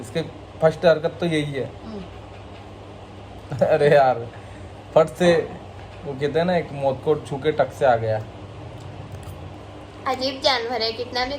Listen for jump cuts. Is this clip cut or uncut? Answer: cut